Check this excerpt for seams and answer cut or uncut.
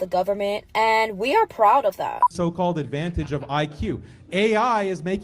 cut